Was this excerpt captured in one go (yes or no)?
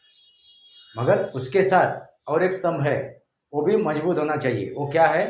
yes